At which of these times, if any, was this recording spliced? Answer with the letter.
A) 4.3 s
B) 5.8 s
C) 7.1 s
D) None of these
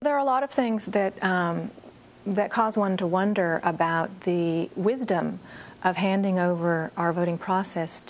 D